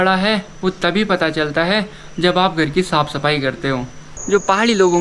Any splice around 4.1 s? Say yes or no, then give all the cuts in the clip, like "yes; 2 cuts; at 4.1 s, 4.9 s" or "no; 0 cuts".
yes; 1 cut; at 4.1 s